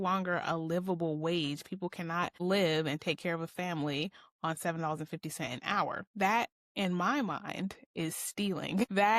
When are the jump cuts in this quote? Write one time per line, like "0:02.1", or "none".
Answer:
0:02.3
0:06.1